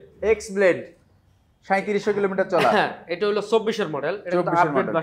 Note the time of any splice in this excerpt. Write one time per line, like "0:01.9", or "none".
none